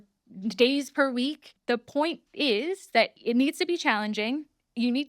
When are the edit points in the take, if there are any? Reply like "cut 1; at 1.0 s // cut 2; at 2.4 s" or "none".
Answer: cut 1; at 1.5 s // cut 2; at 3.2 s